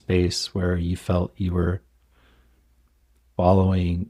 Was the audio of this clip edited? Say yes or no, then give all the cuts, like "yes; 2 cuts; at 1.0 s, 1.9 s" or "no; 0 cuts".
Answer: no; 0 cuts